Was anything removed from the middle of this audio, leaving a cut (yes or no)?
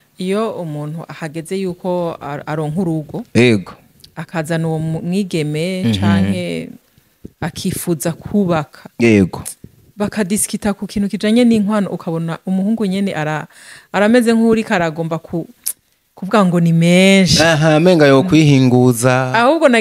no